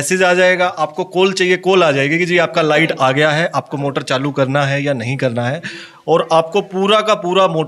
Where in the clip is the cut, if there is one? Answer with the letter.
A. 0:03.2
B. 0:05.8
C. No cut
B